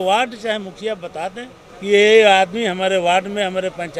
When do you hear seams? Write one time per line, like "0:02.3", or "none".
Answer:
0:01.6